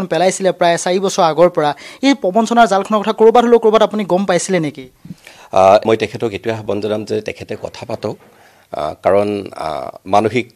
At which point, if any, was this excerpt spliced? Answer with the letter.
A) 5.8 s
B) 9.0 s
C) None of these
A